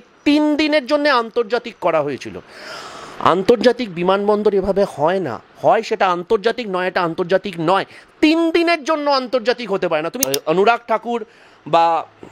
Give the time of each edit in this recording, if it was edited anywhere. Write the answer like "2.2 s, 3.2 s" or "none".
10.2 s